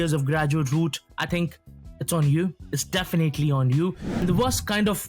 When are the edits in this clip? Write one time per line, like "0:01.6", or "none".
0:04.1